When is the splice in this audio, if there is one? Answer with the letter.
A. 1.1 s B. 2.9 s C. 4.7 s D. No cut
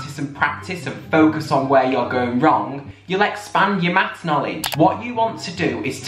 C